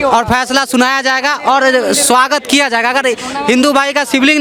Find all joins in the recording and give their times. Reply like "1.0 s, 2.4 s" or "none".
none